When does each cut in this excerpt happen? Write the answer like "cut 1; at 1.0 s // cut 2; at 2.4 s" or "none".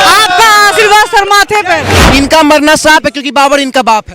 cut 1; at 2.0 s